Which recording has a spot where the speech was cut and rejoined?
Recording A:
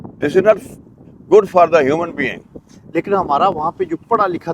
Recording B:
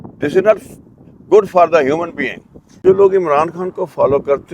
B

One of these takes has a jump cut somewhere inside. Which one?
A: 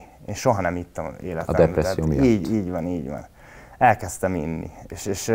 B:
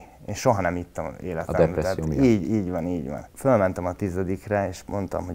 B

